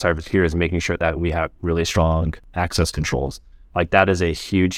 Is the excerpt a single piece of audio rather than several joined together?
no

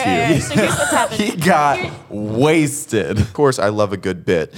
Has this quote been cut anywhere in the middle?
yes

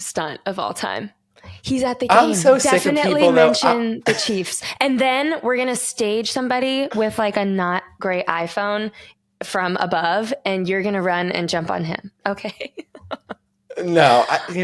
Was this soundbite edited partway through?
no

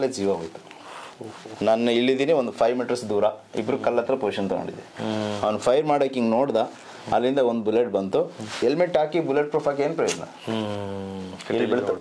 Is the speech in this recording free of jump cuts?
yes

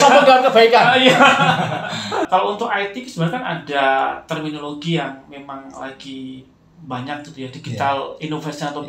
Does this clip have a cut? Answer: yes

